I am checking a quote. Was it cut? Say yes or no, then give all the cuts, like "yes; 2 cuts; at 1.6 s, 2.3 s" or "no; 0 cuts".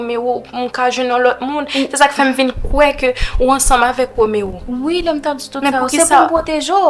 no; 0 cuts